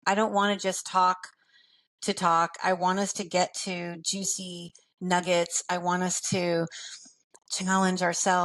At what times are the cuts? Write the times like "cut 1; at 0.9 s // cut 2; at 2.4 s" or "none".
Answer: none